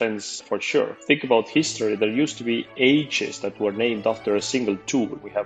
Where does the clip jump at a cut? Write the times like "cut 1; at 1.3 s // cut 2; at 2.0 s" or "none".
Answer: cut 1; at 0.9 s